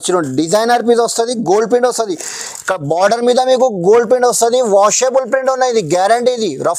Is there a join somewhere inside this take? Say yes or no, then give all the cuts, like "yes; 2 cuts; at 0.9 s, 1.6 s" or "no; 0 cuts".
no; 0 cuts